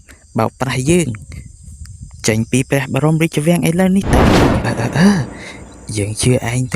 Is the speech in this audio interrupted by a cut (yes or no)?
yes